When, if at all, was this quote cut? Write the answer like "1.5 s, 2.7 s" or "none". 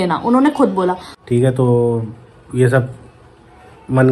1.1 s